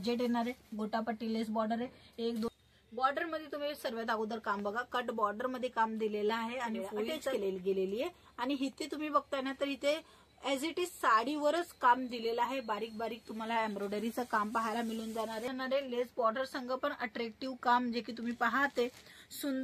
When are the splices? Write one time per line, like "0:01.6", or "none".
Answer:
0:02.5
0:07.3
0:15.5